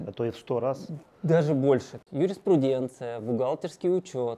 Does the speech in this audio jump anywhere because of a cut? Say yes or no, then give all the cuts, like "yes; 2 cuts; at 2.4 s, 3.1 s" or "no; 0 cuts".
yes; 1 cut; at 1.9 s